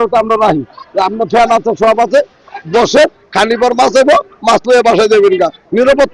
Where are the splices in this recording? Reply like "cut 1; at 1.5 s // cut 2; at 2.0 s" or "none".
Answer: none